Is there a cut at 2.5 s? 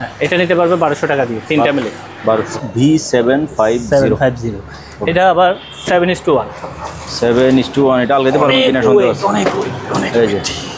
yes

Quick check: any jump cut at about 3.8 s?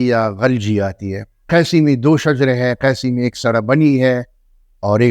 no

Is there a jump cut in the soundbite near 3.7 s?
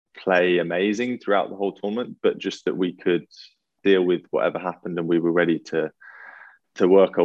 yes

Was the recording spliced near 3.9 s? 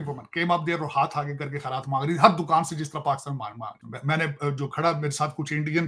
yes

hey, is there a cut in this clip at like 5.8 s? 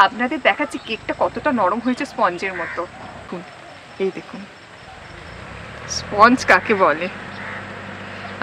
no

